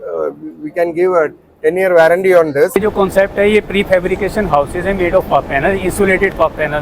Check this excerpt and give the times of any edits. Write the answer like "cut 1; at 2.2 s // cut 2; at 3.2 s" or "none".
cut 1; at 2.8 s

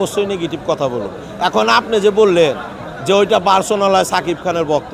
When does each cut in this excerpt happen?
none

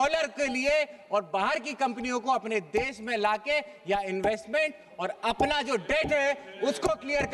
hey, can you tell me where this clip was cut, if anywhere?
none

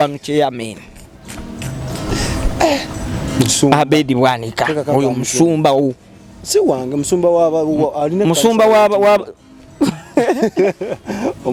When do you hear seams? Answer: none

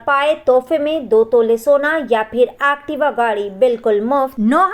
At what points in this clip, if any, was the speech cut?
none

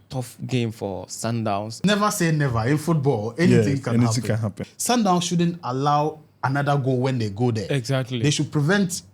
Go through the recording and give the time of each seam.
cut 1; at 1.7 s // cut 2; at 4.6 s

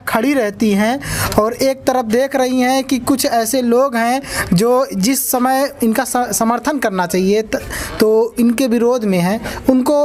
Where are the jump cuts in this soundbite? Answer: none

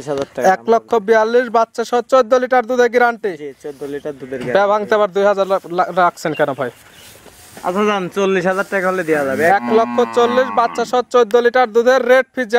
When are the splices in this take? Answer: none

